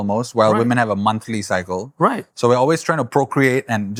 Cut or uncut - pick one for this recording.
uncut